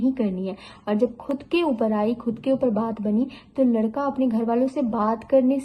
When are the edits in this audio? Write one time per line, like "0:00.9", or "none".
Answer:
none